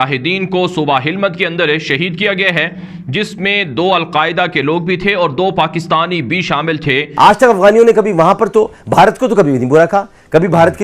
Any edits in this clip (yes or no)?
yes